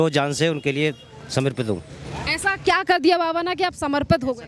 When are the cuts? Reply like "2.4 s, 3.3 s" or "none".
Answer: none